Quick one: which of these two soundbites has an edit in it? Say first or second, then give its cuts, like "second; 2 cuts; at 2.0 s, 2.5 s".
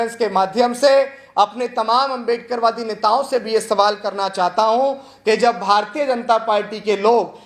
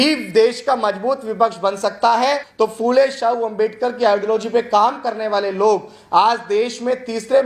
second; 1 cut; at 2.5 s